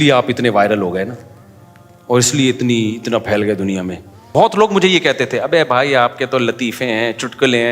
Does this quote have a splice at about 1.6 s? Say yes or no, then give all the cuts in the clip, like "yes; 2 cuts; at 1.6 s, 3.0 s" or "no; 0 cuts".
no; 1 cut; at 4.1 s